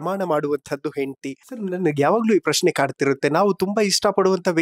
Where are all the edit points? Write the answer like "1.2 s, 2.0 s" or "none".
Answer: 1.5 s